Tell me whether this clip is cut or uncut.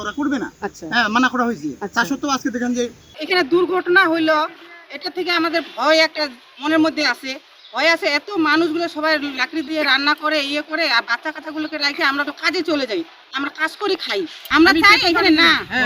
cut